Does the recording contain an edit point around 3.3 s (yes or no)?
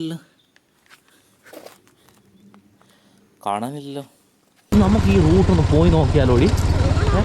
no